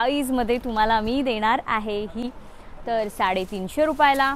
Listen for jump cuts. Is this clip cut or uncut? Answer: cut